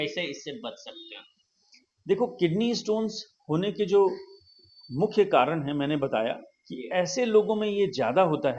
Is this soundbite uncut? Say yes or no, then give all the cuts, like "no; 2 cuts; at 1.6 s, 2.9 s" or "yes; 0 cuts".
yes; 0 cuts